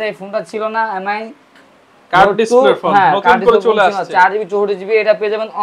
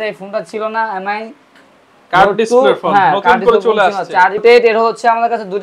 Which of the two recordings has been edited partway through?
second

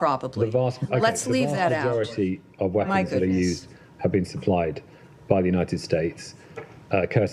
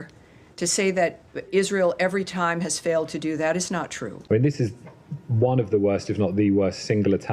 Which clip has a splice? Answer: second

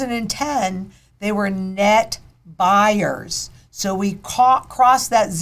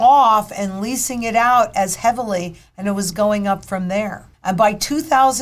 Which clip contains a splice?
second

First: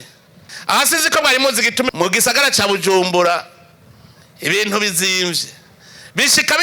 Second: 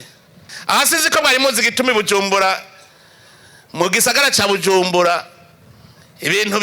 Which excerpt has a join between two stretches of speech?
first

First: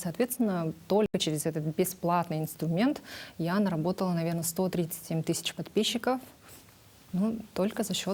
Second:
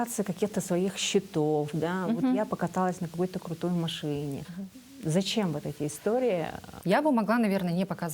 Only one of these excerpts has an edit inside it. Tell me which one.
second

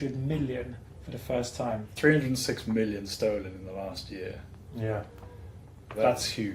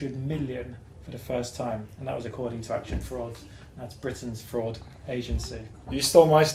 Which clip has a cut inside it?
first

